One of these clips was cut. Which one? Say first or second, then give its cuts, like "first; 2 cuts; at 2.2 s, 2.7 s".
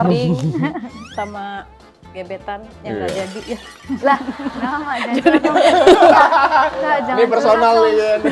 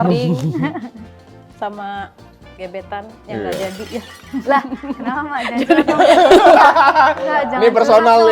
first; 1 cut; at 1.0 s